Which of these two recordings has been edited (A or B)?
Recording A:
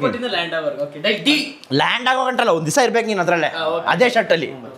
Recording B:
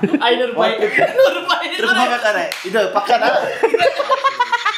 B